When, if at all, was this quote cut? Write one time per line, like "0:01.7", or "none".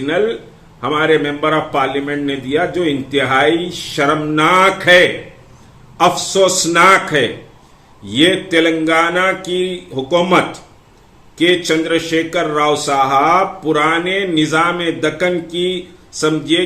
none